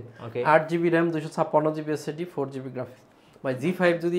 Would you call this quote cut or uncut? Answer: uncut